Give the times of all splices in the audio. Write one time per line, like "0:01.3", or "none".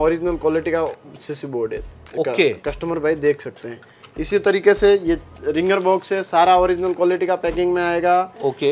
none